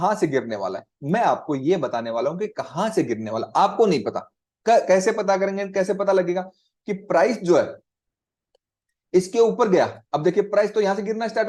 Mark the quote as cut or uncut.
uncut